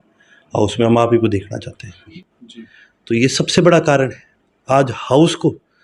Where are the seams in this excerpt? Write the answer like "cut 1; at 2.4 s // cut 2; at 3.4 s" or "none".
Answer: cut 1; at 2.1 s